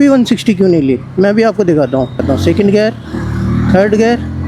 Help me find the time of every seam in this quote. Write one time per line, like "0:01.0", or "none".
0:02.2